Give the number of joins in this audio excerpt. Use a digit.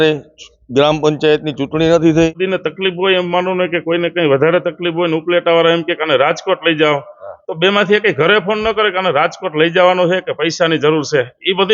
1